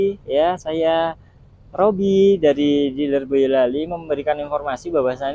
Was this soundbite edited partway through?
no; 0 cuts

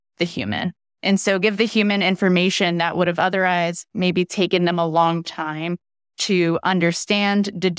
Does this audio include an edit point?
no; 0 cuts

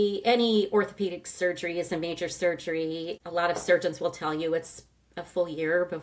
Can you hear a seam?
yes; 1 cut; at 3.2 s

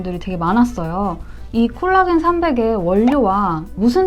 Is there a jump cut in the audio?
yes; 1 cut; at 1.3 s

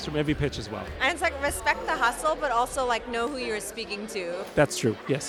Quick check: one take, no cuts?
yes; 0 cuts

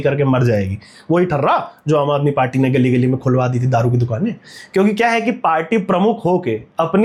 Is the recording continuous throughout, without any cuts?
yes; 0 cuts

